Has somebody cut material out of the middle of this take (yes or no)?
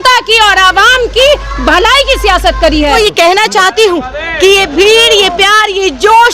yes